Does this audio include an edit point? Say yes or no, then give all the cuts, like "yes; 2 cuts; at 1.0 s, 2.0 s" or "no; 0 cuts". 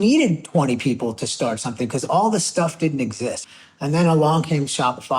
yes; 1 cut; at 3.4 s